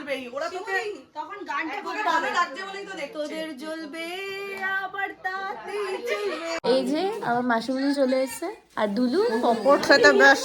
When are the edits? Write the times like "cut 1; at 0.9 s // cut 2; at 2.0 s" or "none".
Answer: cut 1; at 6.4 s